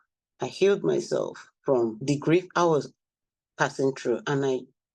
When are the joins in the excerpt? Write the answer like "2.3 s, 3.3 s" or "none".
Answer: 2.0 s